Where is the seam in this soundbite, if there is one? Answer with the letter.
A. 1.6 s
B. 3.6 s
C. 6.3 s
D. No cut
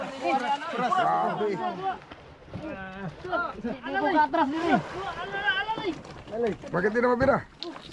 A